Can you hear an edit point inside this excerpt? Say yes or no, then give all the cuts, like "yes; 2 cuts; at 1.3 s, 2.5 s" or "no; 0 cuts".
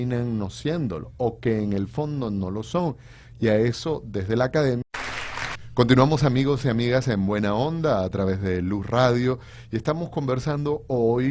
no; 0 cuts